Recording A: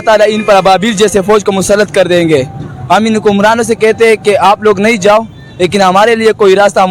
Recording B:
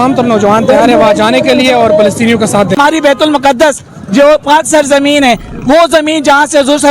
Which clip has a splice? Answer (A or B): B